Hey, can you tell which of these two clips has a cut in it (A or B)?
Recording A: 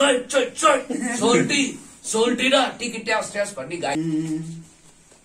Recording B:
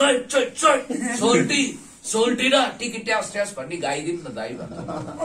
A